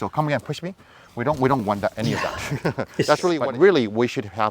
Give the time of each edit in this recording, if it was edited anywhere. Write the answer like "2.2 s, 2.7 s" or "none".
3.4 s